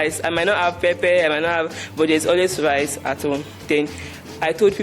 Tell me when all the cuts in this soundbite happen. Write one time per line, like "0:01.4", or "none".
0:03.6